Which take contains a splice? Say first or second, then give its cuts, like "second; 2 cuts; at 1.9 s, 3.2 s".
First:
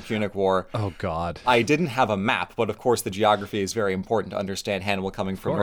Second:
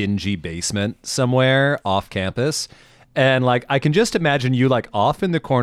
first; 1 cut; at 1.4 s